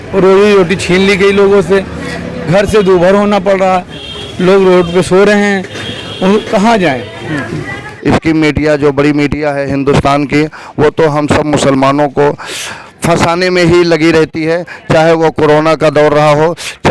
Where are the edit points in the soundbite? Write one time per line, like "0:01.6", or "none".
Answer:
0:04.0
0:07.8